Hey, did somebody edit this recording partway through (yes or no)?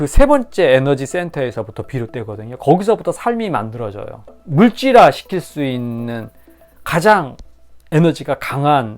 yes